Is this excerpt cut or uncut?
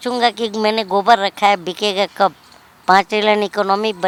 uncut